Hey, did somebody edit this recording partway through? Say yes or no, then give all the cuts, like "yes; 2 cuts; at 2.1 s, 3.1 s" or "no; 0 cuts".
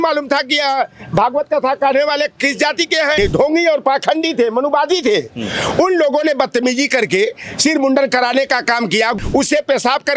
yes; 2 cuts; at 3.2 s, 9.1 s